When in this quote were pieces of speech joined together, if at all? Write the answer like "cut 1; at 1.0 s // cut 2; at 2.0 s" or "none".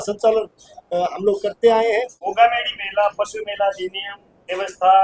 cut 1; at 2.2 s